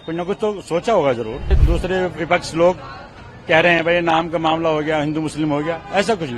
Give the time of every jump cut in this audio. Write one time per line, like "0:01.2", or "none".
0:01.6

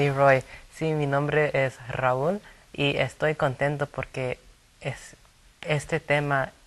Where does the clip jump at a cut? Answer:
0:04.4

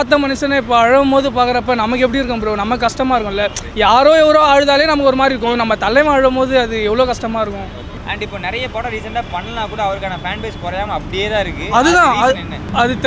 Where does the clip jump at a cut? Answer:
none

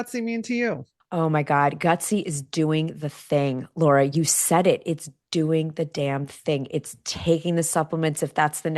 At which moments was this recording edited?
0:00.9

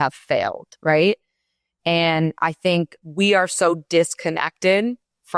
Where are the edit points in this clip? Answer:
0:03.0

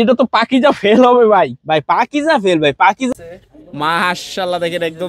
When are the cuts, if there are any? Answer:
0:03.1

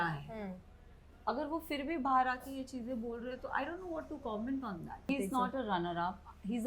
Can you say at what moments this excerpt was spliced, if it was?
0:05.1

